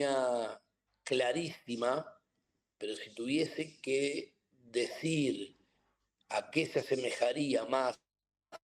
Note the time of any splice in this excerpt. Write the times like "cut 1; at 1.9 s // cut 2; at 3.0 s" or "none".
none